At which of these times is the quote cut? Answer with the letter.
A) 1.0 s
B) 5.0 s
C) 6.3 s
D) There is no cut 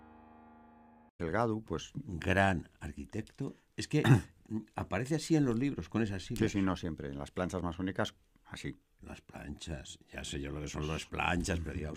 D